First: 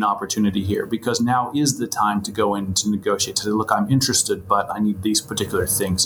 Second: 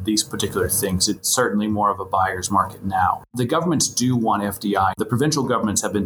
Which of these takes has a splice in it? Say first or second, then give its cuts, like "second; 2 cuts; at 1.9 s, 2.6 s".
second; 2 cuts; at 3.3 s, 4.9 s